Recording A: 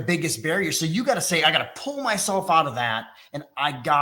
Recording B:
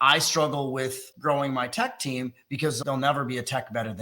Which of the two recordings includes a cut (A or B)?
B